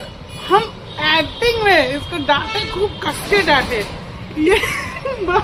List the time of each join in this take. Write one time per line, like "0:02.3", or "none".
none

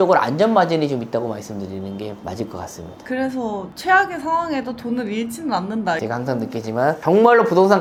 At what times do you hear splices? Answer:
none

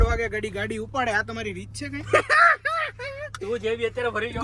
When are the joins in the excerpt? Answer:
0:02.0

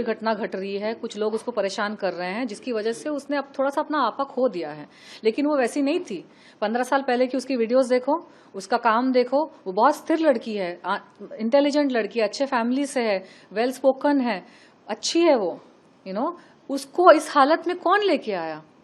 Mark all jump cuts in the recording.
none

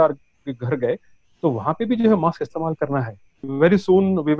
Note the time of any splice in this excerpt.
0:03.4

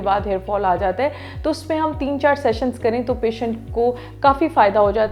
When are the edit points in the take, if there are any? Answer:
none

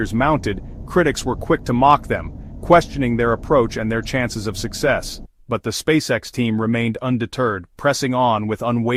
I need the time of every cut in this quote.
none

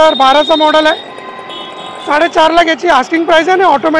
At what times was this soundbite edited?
none

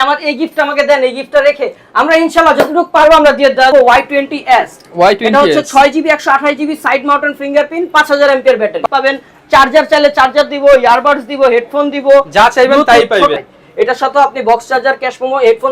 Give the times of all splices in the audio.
0:03.7
0:08.8
0:13.5

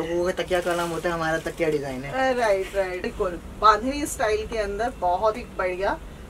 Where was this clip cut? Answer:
0:03.1

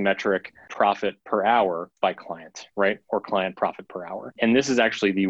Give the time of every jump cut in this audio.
0:01.0
0:01.9
0:04.3

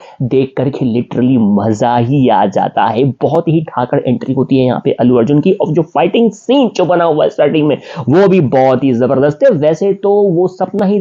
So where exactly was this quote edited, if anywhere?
none

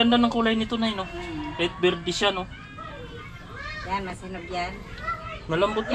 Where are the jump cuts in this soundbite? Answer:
none

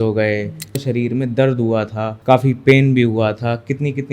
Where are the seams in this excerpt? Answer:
0:00.8
0:02.1

